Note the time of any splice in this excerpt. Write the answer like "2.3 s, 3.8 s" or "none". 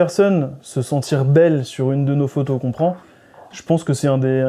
none